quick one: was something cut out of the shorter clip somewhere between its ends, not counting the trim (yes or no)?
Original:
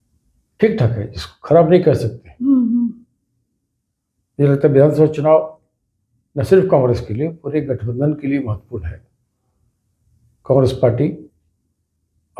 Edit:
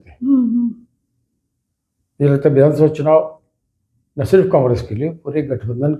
no